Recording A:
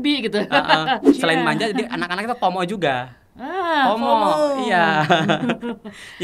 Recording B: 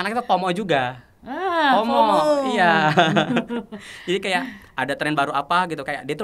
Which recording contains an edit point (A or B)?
A